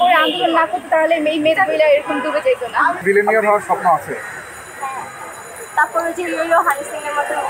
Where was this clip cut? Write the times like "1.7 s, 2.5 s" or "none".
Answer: 3.0 s